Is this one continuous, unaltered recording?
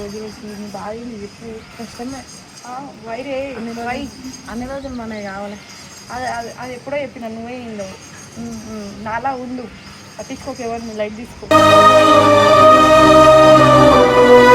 yes; 0 cuts

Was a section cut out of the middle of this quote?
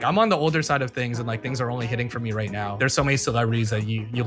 yes; 1 cut; at 2.7 s

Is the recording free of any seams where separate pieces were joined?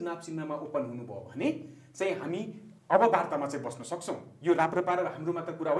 yes; 0 cuts

